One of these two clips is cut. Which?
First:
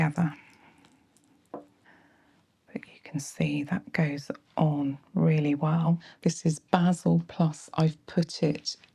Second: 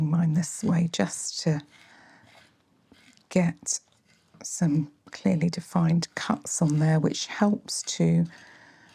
first; 2 cuts; at 1.8 s, 6.1 s

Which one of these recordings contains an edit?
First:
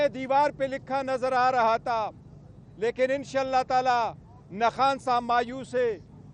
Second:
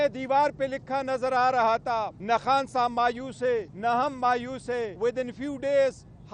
second; 3 cuts; at 2.1 s, 3.7 s, 4.9 s

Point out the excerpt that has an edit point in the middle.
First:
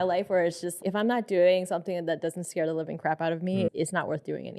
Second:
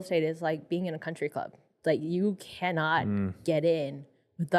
first; 2 cuts; at 0.8 s, 3.7 s

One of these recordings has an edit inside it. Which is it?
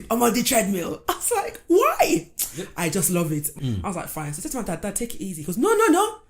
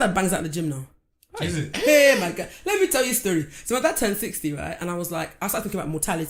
first; 1 cut; at 3.5 s

